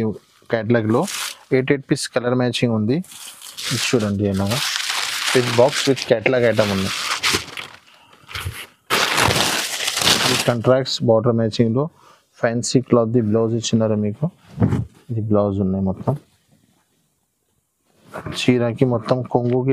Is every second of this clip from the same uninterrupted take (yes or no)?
yes